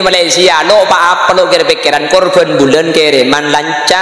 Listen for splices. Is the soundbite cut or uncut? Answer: uncut